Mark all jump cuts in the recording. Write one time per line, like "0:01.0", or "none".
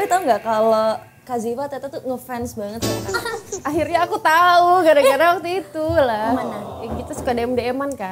0:03.6